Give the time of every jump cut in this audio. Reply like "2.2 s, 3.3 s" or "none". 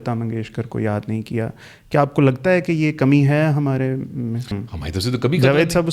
4.5 s